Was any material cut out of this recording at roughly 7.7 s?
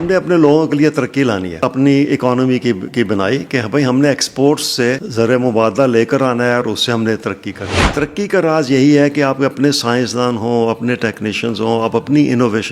yes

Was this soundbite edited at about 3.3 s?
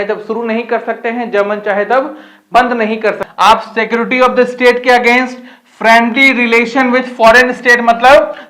yes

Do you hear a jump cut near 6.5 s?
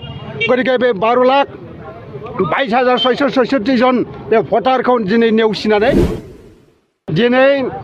yes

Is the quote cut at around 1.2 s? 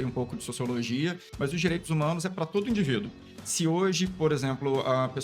yes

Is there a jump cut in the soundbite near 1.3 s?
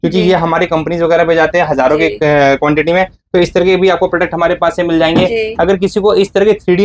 no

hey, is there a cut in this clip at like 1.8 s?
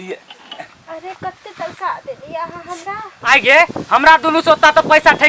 no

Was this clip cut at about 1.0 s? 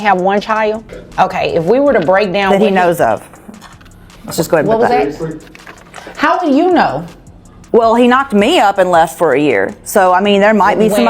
yes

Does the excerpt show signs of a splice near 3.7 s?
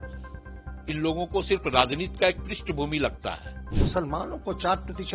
yes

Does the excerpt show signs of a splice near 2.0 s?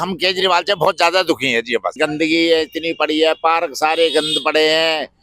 yes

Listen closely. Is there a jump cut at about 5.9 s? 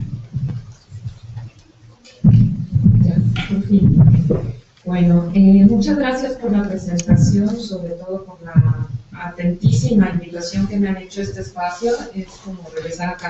no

